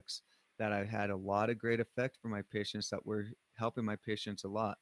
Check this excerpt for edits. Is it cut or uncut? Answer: uncut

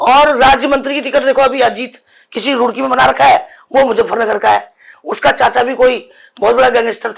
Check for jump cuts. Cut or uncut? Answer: uncut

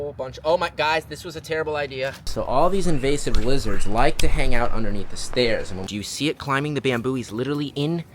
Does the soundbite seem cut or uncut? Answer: cut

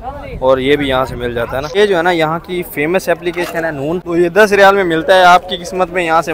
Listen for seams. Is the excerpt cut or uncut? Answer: cut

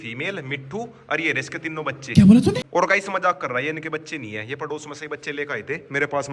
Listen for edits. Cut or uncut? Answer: uncut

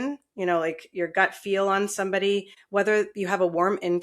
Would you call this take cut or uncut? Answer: cut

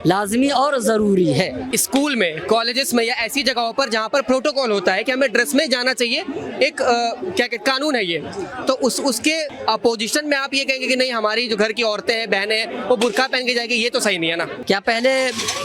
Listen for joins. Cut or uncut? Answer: cut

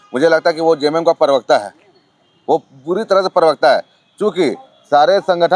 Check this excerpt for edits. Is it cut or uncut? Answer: uncut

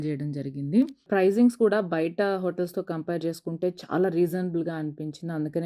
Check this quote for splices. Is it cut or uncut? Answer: cut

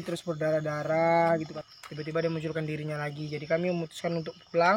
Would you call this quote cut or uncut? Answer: cut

